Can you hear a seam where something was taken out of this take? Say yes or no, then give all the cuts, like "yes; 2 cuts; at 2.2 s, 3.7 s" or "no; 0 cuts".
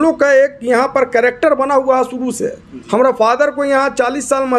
no; 0 cuts